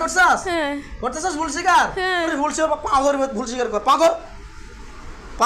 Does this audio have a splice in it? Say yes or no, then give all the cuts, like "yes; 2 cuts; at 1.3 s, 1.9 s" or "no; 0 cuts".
yes; 1 cut; at 2.3 s